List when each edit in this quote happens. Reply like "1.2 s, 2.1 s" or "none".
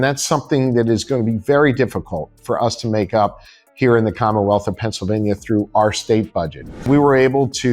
6.7 s